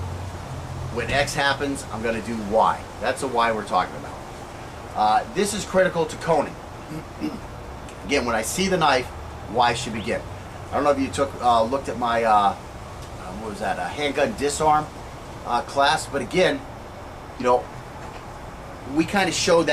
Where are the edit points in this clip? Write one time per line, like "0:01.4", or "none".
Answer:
0:10.3